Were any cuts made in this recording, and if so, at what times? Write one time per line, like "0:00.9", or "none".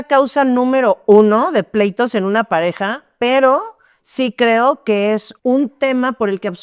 0:05.3